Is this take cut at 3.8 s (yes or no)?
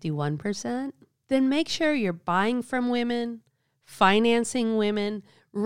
no